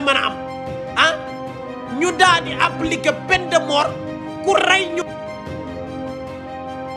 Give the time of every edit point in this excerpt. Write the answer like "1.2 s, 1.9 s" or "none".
5.4 s